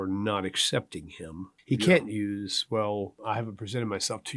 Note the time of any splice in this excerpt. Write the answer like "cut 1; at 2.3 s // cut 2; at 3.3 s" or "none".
cut 1; at 1.5 s // cut 2; at 3.2 s